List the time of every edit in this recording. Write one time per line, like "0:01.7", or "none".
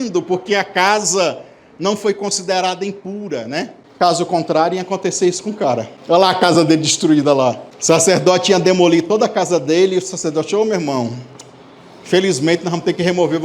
0:03.8
0:05.9
0:07.7